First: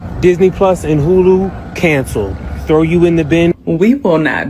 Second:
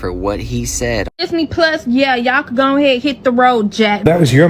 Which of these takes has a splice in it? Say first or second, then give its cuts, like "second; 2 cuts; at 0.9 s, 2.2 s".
second; 1 cut; at 1.1 s